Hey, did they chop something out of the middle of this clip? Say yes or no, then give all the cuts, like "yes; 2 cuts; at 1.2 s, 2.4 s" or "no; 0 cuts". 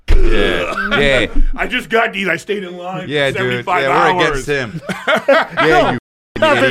no; 0 cuts